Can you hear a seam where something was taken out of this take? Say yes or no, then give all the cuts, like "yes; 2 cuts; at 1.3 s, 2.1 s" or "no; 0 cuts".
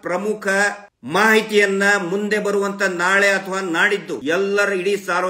yes; 2 cuts; at 0.9 s, 4.2 s